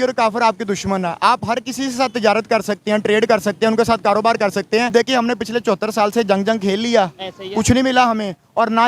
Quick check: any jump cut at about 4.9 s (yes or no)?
yes